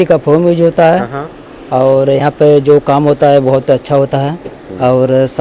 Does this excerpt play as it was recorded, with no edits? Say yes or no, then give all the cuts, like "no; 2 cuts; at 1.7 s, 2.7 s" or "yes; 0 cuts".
yes; 0 cuts